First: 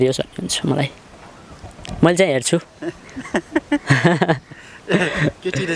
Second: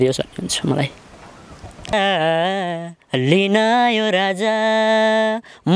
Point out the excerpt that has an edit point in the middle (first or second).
second